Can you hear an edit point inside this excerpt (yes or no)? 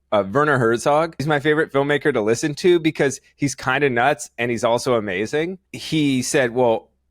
yes